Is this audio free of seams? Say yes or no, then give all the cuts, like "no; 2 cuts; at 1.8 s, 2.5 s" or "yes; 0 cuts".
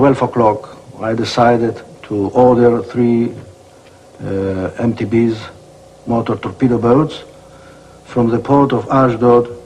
no; 1 cut; at 3.5 s